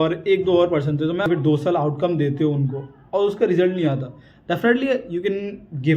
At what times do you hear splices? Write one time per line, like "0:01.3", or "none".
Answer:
0:01.3